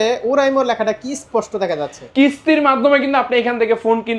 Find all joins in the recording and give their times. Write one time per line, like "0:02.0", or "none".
0:02.0